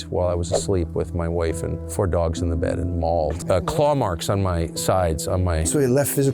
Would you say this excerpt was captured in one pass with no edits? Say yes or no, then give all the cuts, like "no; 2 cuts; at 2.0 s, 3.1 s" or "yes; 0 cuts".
no; 1 cut; at 3.4 s